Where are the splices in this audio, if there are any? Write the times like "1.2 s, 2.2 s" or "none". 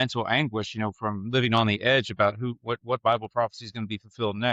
none